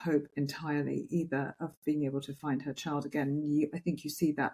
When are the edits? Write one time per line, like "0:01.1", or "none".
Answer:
none